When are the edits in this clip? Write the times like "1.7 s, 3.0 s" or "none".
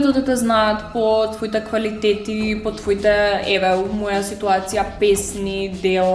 none